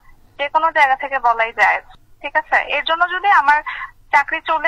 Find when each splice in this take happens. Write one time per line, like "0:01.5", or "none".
none